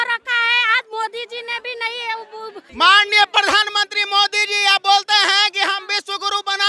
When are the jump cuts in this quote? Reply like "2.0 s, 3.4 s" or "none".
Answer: 2.6 s